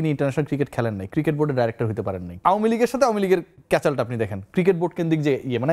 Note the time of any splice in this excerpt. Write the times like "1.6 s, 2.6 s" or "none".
2.4 s